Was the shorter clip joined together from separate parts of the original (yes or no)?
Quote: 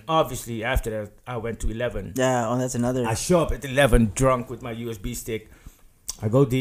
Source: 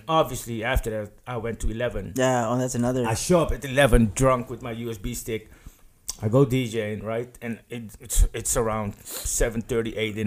no